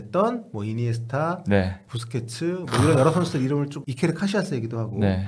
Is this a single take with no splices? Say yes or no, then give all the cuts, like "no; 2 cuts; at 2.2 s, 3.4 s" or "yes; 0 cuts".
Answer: no; 2 cuts; at 1.8 s, 3.8 s